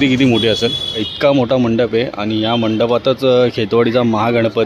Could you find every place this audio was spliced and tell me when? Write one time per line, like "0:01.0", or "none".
0:01.1

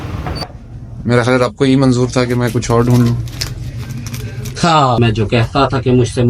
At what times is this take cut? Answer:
0:05.0

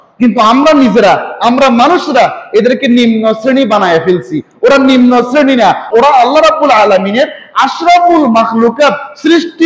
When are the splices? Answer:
0:05.8

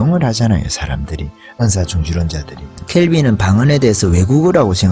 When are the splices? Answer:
none

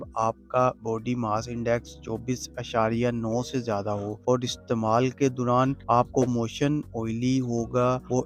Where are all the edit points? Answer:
none

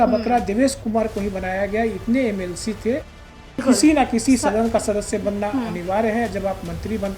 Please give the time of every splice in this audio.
0:03.3

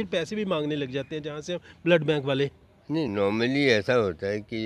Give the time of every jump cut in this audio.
none

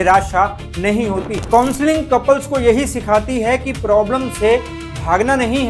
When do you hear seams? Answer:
0:01.4

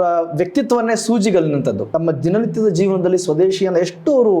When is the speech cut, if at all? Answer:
0:01.8

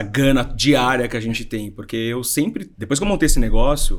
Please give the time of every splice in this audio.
none

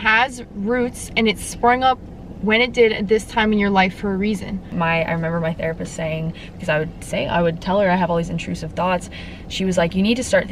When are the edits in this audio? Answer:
0:04.7

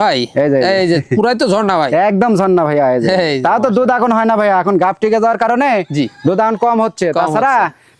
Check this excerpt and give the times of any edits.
none

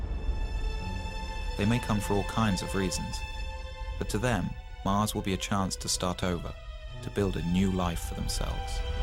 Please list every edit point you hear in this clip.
none

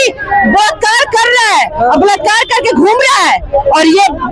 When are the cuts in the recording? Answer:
none

